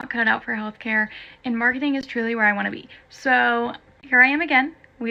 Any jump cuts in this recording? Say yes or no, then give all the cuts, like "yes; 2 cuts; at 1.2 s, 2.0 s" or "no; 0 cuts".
no; 0 cuts